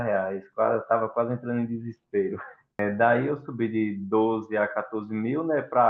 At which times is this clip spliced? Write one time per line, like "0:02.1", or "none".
0:02.8